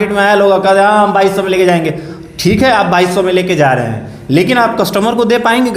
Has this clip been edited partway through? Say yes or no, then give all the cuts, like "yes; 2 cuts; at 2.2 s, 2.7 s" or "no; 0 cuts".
no; 0 cuts